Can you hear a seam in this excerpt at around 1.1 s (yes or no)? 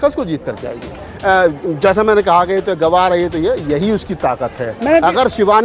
yes